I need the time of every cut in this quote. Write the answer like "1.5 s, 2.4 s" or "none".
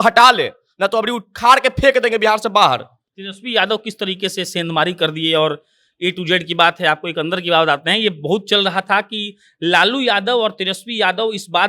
none

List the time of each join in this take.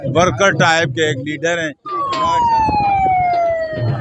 1.9 s

